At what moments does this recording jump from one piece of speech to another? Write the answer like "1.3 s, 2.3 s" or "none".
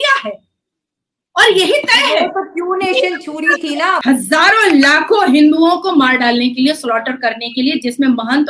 4.0 s